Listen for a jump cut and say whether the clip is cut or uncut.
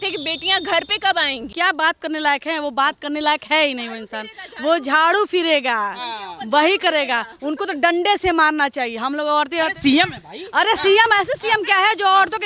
cut